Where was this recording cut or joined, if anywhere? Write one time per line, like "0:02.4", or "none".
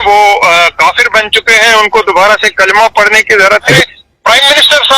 0:03.8